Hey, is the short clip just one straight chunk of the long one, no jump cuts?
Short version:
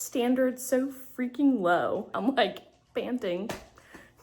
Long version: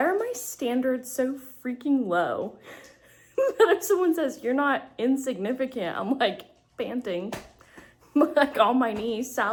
no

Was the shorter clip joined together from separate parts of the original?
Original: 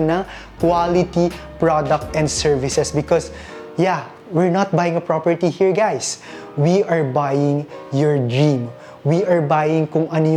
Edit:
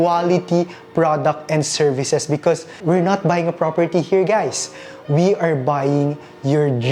yes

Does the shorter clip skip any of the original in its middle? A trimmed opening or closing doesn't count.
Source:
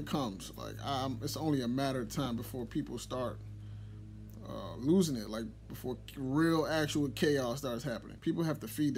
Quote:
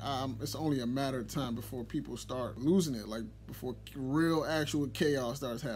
yes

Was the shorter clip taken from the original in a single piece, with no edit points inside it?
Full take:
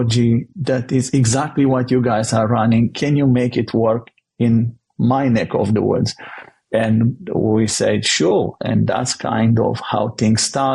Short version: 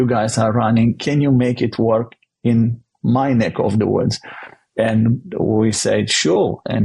yes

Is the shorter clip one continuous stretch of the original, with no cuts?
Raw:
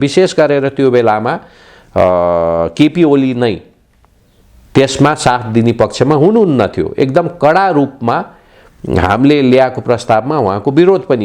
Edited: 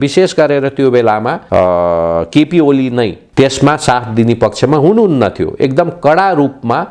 no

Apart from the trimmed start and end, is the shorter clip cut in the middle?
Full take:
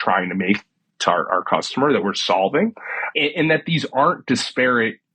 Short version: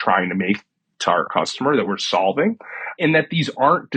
yes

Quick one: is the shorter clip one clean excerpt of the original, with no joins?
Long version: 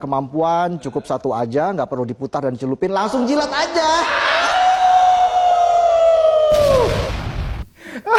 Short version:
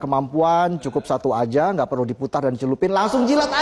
yes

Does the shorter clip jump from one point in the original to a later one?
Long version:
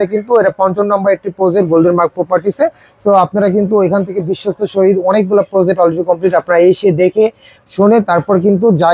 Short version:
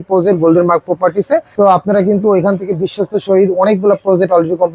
yes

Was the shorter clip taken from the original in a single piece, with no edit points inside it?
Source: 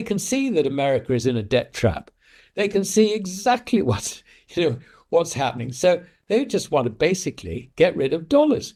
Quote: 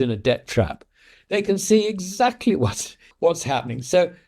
no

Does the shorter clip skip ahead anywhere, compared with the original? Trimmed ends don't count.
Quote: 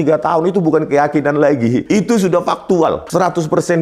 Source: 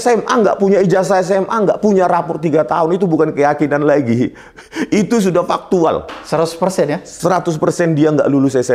yes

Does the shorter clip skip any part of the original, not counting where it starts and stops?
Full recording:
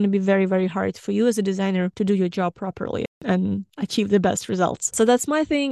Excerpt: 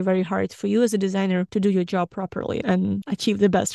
yes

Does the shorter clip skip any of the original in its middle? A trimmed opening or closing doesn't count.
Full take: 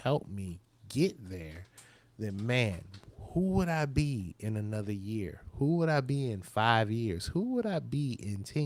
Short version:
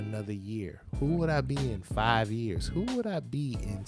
no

